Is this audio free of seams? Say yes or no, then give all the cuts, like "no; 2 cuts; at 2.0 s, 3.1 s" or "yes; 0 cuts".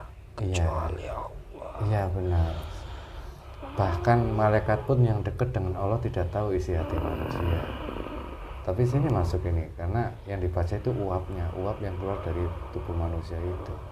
yes; 0 cuts